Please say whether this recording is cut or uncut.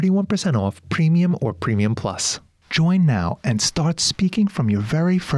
cut